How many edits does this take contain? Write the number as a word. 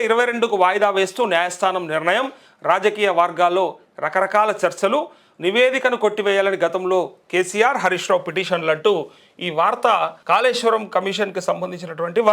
one